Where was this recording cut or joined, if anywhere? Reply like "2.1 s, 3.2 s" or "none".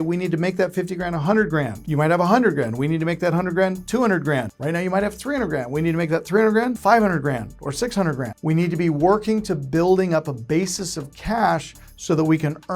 1.8 s, 4.5 s, 6.8 s, 8.3 s